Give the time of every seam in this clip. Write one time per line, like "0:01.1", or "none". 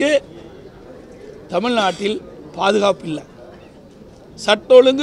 none